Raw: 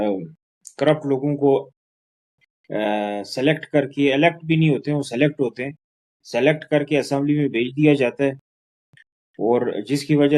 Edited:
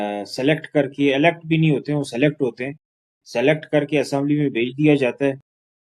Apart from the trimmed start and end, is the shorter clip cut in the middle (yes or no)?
no